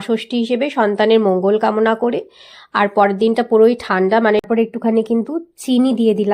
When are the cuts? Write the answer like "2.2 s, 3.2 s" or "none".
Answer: 4.4 s